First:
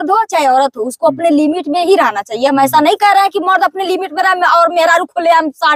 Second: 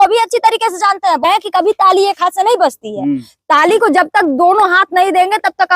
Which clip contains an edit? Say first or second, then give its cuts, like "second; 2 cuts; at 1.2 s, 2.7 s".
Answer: second; 1 cut; at 1.2 s